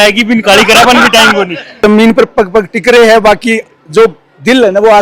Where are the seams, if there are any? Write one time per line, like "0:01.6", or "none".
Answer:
0:01.8